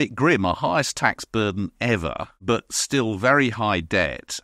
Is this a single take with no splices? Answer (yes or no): no